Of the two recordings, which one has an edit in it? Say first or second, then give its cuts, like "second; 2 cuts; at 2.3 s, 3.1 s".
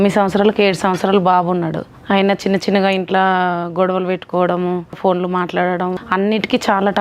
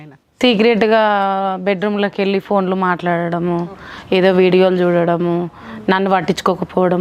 first; 3 cuts; at 1.9 s, 5.0 s, 6.0 s